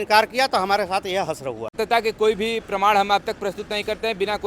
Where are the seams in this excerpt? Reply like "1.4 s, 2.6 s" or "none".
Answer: 1.8 s